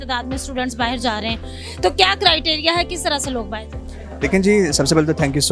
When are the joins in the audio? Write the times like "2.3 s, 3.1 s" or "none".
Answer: none